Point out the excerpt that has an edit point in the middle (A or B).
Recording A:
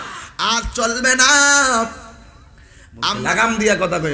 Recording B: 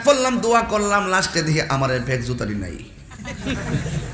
A